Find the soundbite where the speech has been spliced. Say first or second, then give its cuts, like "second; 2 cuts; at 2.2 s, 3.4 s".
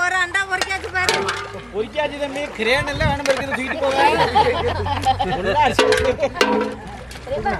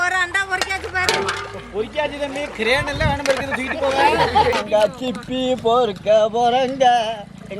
second; 1 cut; at 4.6 s